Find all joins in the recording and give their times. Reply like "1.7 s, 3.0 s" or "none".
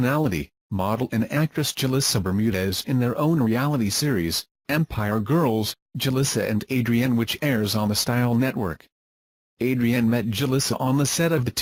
none